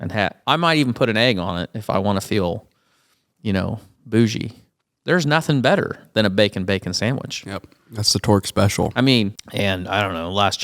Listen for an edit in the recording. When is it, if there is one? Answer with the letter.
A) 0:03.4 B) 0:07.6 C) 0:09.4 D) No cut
C